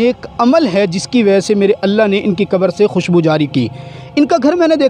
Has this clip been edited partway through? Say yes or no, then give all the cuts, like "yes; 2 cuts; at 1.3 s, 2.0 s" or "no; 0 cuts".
no; 0 cuts